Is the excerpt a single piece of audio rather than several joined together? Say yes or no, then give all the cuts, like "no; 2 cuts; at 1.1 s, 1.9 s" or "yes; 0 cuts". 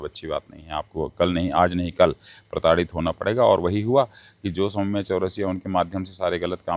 yes; 0 cuts